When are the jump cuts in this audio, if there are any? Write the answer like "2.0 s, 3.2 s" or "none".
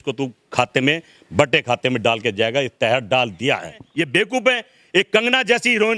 3.8 s